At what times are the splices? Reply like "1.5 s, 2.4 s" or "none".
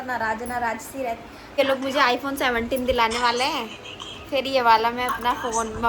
1.5 s